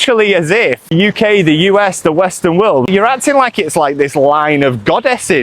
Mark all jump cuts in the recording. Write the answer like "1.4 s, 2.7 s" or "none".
0.9 s, 2.9 s